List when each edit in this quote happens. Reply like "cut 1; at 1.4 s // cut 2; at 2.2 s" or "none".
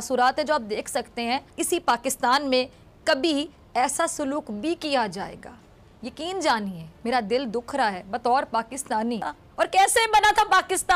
cut 1; at 1.5 s // cut 2; at 9.4 s